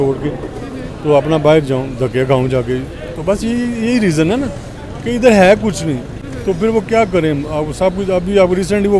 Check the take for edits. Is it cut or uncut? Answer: uncut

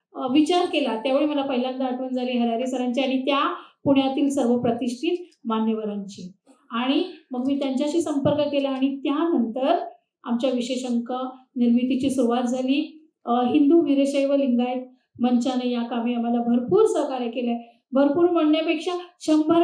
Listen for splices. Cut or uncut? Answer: uncut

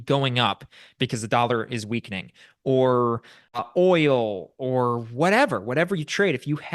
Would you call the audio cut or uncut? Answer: cut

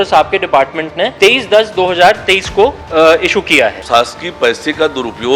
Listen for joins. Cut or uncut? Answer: cut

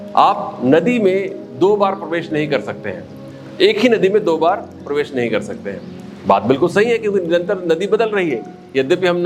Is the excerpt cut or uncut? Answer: uncut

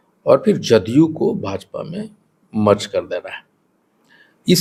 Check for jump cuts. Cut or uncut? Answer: uncut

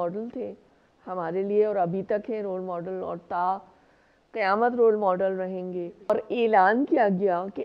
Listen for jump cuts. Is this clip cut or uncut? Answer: cut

